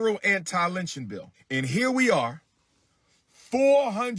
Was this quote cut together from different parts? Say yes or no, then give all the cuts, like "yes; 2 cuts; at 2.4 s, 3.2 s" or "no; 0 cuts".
yes; 1 cut; at 1.3 s